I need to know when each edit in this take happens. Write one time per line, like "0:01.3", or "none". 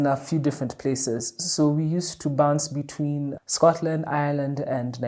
none